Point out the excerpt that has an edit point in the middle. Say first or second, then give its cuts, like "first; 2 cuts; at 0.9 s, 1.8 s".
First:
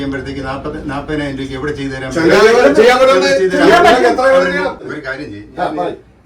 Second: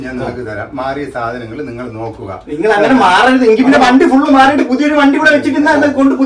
first; 1 cut; at 4.8 s